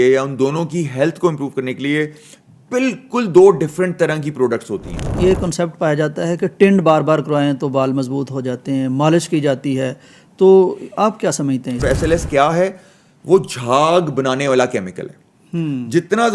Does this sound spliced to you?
yes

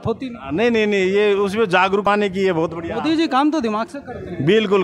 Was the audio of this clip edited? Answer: yes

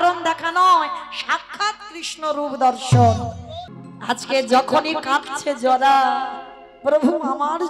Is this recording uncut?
no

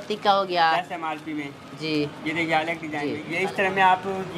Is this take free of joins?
no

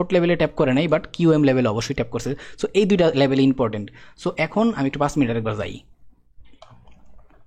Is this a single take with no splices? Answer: yes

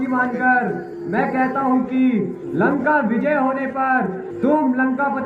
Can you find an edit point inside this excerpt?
yes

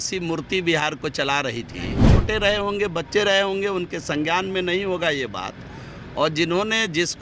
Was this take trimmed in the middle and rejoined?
yes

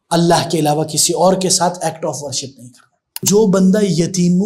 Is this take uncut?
no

